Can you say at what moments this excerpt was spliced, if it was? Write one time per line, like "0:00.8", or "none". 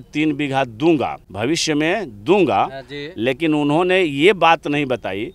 0:01.2